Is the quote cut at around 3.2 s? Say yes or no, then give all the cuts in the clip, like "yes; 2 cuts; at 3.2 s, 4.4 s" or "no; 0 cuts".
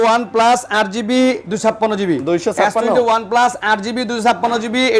no; 0 cuts